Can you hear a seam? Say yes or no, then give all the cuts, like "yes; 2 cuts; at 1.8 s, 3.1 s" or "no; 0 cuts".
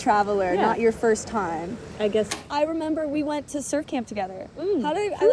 yes; 1 cut; at 2.3 s